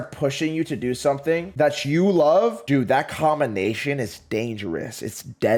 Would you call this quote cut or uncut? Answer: uncut